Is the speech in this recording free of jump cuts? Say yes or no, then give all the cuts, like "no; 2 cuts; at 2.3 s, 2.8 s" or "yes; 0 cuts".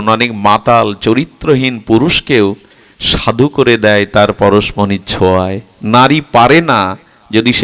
yes; 0 cuts